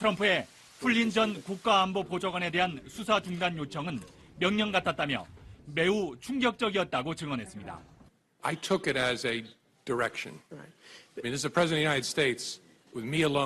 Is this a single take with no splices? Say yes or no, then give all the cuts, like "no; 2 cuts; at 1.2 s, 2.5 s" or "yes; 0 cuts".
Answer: yes; 0 cuts